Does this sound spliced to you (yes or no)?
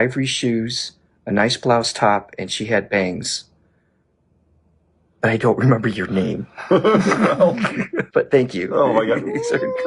no